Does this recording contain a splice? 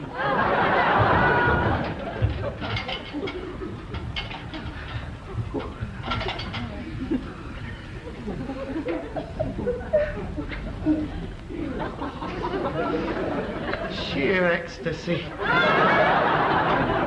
no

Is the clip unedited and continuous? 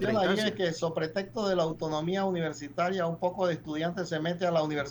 yes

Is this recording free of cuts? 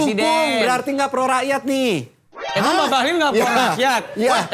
yes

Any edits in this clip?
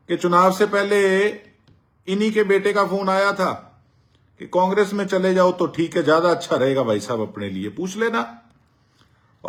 no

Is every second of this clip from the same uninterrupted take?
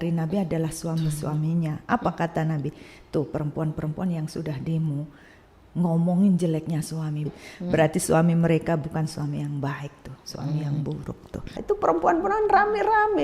no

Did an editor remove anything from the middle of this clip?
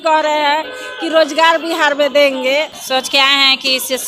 yes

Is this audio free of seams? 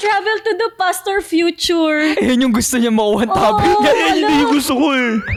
yes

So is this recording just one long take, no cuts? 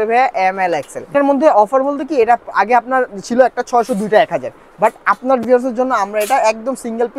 no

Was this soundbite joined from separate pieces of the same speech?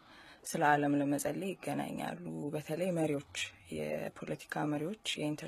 no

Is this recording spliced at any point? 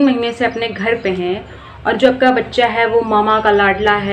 no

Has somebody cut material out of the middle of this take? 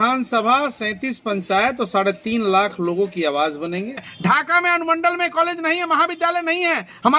yes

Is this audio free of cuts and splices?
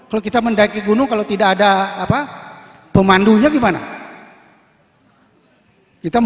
yes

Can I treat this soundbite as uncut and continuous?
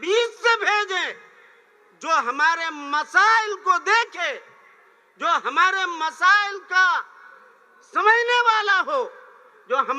yes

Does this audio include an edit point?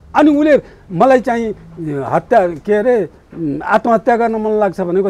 no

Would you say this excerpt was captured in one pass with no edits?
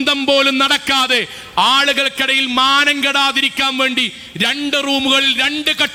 yes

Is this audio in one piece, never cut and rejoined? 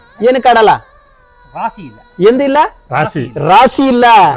yes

